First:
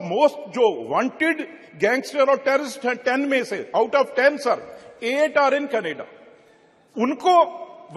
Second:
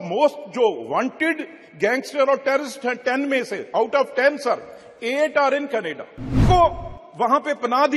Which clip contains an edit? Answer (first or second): second